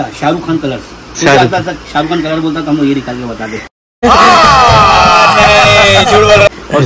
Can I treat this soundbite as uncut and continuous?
yes; 0 cuts

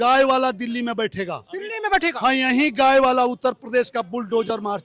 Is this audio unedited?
yes; 0 cuts

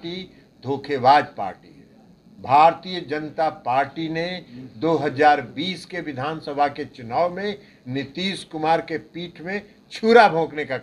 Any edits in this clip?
no; 0 cuts

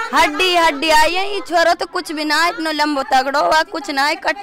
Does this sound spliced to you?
no; 0 cuts

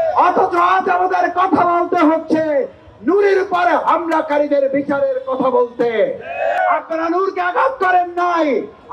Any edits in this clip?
yes; 1 cut; at 6.6 s

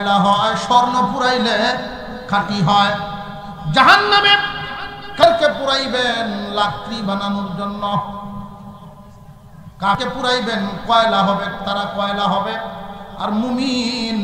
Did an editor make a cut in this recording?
yes; 2 cuts; at 5.2 s, 10.0 s

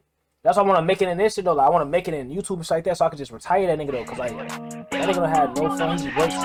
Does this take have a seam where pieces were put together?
no; 0 cuts

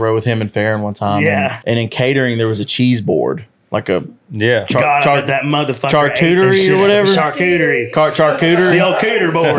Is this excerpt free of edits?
no; 1 cut; at 1.6 s

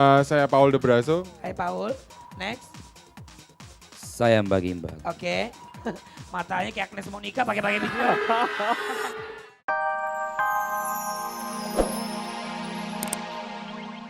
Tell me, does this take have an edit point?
yes; 1 cut; at 9.7 s

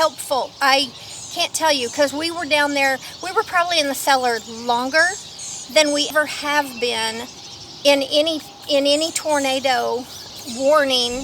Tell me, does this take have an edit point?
yes; 2 cuts; at 6.1 s, 10.2 s

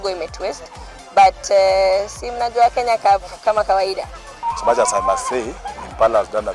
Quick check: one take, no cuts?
no; 1 cut; at 4.2 s

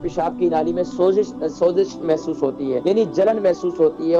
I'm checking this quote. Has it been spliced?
yes; 1 cut; at 2.8 s

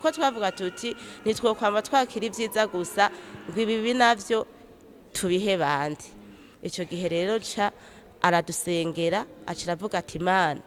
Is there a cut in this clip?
no; 0 cuts

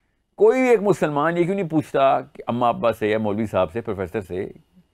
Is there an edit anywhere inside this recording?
no; 0 cuts

